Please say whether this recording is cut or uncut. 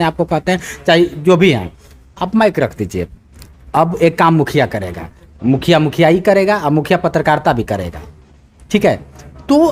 uncut